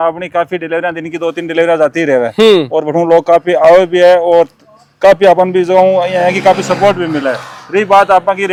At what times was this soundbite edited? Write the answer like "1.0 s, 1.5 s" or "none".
none

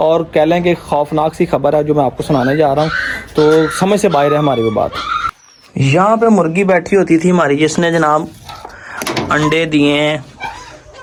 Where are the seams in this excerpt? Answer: none

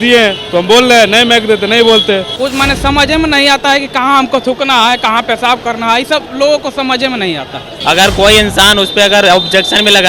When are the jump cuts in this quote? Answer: 2.3 s, 7.7 s

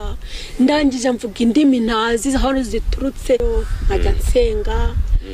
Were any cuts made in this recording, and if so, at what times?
3.4 s

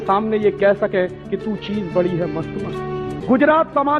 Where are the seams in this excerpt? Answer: 3.1 s

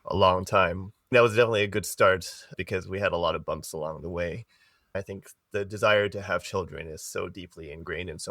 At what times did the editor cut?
1.1 s, 5.0 s

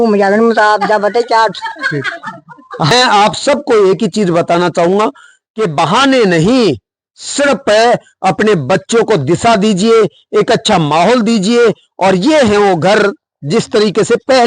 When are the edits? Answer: 2.9 s

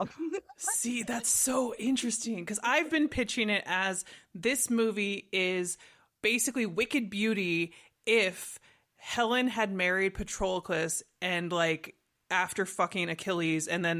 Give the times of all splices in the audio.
none

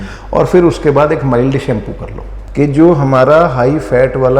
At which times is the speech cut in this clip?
2.5 s

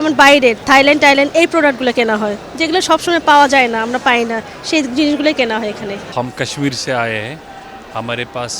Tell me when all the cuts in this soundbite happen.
none

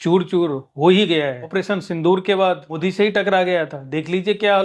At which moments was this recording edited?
1.4 s, 2.7 s

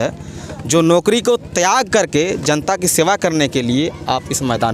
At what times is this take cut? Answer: none

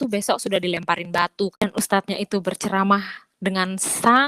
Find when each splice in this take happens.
1.6 s

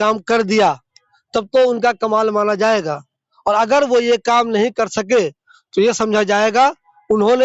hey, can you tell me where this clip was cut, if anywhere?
none

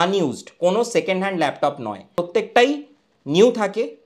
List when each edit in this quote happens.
2.2 s

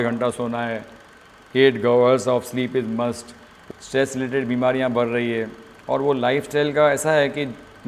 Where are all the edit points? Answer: 3.5 s

